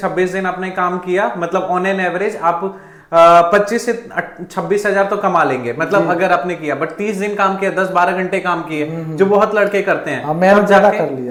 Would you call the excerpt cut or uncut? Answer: uncut